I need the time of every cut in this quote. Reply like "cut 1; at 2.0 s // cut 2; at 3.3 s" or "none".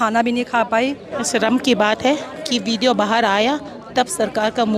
cut 1; at 1.1 s